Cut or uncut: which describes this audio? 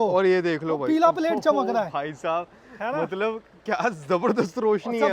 uncut